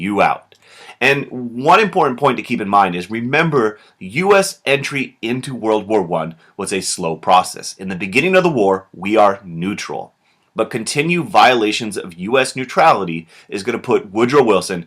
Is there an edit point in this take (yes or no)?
yes